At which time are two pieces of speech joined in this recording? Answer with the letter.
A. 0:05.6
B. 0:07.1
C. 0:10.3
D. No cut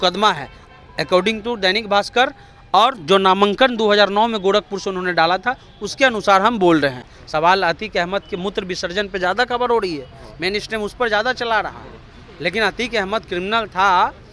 B